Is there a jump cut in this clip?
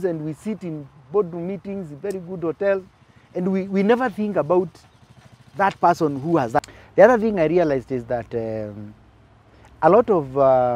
yes; 1 cut; at 6.6 s

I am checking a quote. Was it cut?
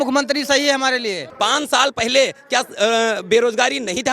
yes; 1 cut; at 1.3 s

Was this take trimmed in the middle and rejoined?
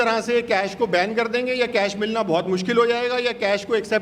no; 0 cuts

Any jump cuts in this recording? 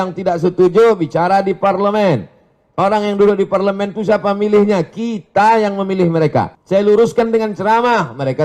yes; 1 cut; at 6.6 s

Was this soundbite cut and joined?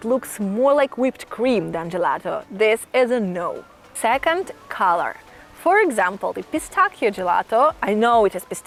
no; 0 cuts

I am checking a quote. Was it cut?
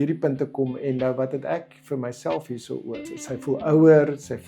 yes; 1 cut; at 3.1 s

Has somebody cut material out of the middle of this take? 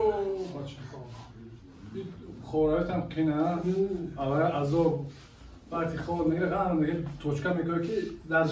no; 0 cuts

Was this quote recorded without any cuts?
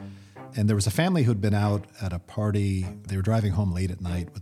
yes; 0 cuts

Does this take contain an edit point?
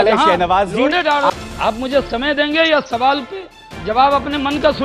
yes; 1 cut; at 1.3 s

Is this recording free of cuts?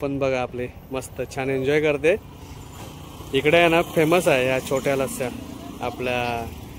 yes; 0 cuts

